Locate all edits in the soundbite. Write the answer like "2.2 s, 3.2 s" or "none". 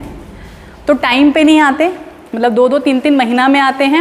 none